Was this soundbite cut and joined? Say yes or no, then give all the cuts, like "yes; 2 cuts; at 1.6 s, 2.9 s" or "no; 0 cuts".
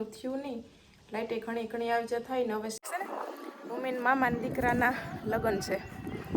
yes; 1 cut; at 2.8 s